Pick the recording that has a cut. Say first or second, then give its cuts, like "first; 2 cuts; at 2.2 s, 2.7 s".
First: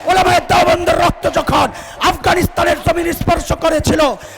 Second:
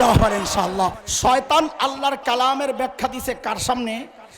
second; 1 cut; at 1.0 s